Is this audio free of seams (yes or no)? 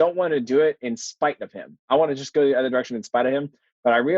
no